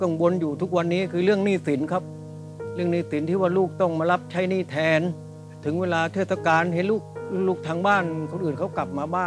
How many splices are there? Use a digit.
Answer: 1